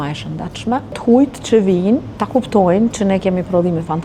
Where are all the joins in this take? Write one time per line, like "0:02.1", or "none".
0:01.0
0:02.1